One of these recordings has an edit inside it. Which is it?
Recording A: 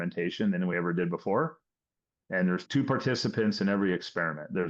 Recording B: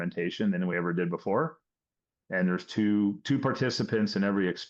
A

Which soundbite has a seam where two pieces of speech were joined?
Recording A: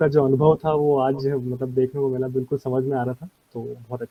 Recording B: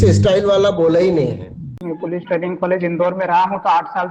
B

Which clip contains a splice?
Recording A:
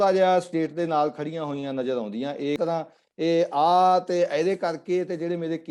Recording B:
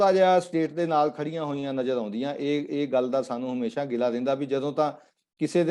A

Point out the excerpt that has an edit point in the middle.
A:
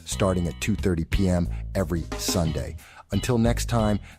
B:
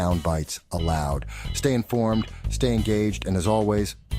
A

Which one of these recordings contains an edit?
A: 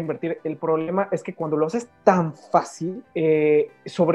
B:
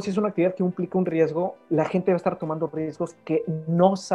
A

